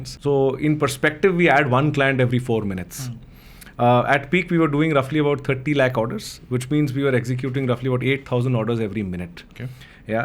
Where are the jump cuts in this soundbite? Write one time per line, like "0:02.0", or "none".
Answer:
none